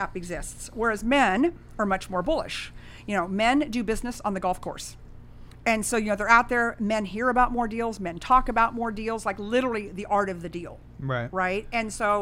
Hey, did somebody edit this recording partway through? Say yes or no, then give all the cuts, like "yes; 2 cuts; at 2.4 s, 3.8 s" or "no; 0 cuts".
no; 0 cuts